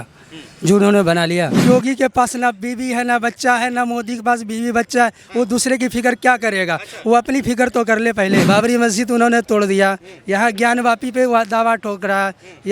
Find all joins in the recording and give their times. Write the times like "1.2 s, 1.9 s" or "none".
1.6 s, 8.4 s

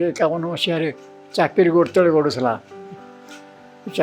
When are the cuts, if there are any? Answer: none

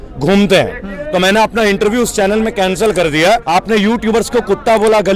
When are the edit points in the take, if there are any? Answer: 3.4 s

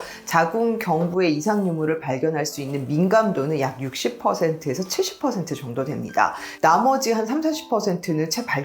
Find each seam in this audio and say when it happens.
6.5 s

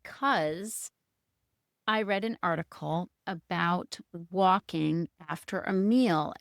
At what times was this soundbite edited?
none

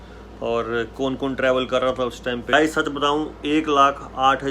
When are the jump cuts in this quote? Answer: 2.5 s

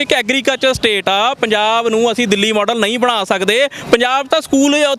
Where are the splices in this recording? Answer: none

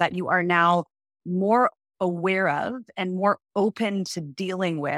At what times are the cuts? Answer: none

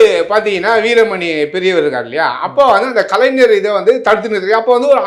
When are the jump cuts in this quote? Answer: none

